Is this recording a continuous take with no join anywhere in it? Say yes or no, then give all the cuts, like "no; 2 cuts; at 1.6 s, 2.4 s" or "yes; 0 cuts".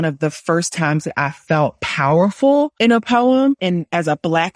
no; 2 cuts; at 2.7 s, 3.6 s